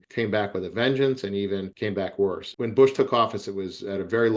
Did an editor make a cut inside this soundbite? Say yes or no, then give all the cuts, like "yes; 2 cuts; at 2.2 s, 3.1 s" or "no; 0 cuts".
yes; 1 cut; at 2.5 s